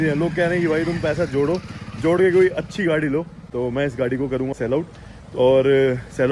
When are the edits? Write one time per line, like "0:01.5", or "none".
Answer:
0:03.4
0:04.5